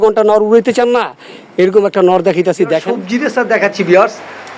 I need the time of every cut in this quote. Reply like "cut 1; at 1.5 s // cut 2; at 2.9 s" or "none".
cut 1; at 3.0 s